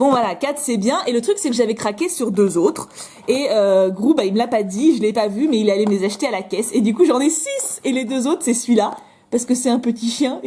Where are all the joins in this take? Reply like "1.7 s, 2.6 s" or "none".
none

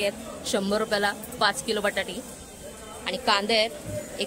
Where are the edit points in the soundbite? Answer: none

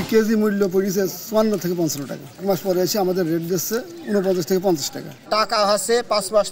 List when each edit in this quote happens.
2.4 s, 5.1 s

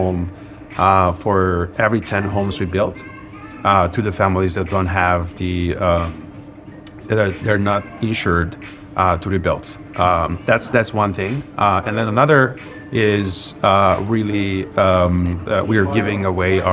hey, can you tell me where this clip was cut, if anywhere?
none

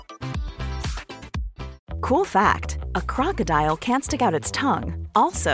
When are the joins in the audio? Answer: 1.8 s

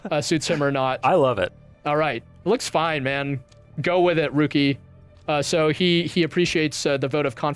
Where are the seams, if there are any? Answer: 1.0 s

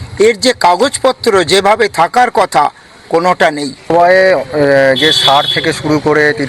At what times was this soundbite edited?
3.9 s

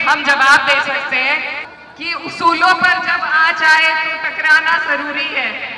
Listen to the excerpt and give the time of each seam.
1.6 s

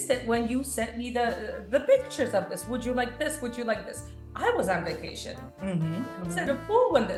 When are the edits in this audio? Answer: none

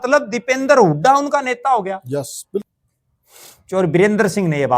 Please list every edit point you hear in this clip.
2.7 s

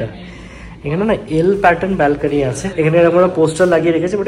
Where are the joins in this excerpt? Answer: 2.6 s

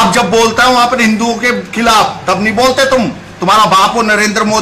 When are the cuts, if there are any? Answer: none

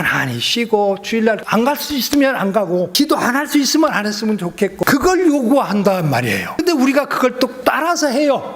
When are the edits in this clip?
1.4 s, 2.9 s, 4.8 s, 6.6 s, 7.6 s

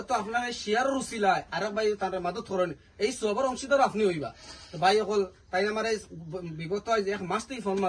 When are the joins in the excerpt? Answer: none

